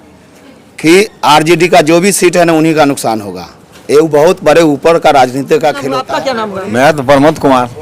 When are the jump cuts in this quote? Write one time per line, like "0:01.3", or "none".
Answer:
0:06.0